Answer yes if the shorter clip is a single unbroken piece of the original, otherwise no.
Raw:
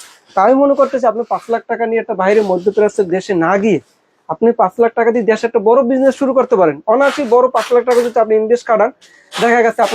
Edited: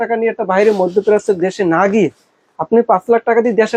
yes